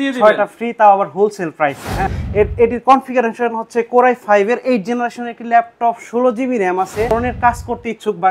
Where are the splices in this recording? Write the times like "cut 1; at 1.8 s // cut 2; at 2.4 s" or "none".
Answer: cut 1; at 2.0 s // cut 2; at 7.1 s

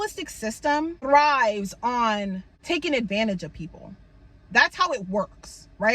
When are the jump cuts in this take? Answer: cut 1; at 1.0 s // cut 2; at 2.5 s

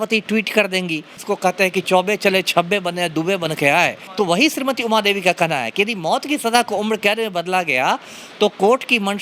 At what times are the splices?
cut 1; at 1.1 s // cut 2; at 4.0 s

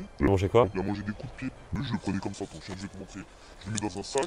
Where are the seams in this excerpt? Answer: cut 1; at 1.8 s

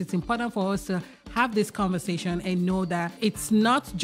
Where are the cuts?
cut 1; at 3.1 s

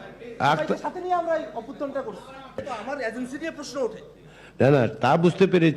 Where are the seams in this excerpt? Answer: cut 1; at 2.7 s

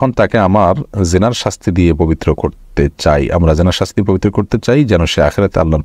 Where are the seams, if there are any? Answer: none

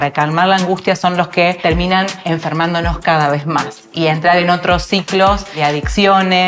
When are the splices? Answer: cut 1; at 2.0 s // cut 2; at 5.5 s

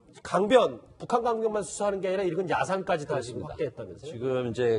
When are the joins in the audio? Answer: cut 1; at 2.9 s

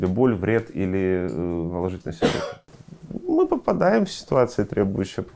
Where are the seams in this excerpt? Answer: cut 1; at 2.7 s

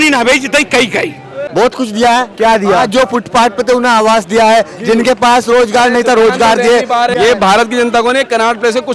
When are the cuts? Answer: cut 1; at 1.4 s // cut 2; at 7.1 s

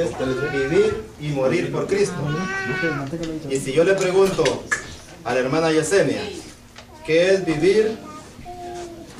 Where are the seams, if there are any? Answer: none

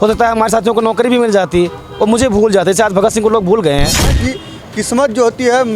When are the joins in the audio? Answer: cut 1; at 4.2 s

